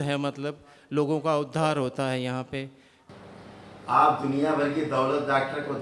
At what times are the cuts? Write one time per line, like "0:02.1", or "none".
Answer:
0:02.9